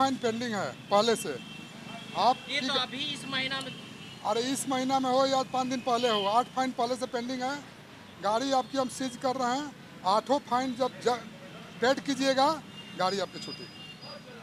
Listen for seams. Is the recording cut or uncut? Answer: uncut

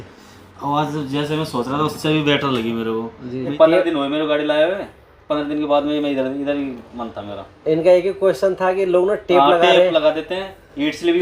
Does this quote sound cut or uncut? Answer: cut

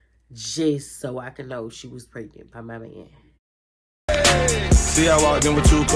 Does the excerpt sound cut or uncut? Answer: cut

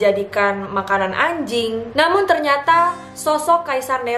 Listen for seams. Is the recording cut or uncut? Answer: cut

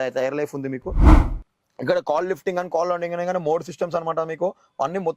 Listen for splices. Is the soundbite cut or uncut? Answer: cut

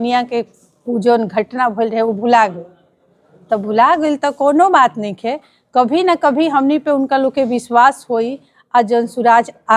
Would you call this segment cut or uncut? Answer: uncut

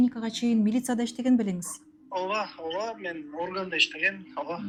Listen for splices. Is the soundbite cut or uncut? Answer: uncut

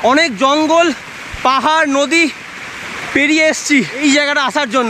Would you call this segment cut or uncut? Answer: cut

